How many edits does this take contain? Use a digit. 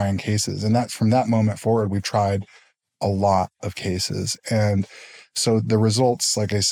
0